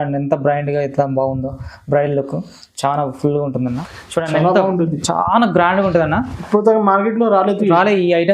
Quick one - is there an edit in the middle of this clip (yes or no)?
yes